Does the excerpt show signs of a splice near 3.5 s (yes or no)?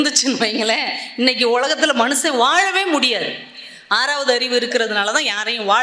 no